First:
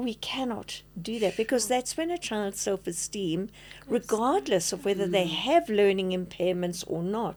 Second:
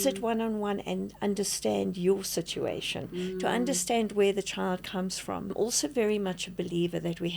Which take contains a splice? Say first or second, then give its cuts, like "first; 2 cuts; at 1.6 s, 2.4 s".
second; 1 cut; at 5.5 s